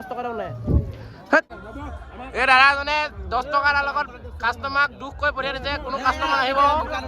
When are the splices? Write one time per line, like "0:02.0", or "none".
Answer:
0:01.4